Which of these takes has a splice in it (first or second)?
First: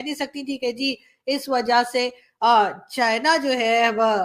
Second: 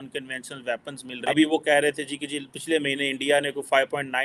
second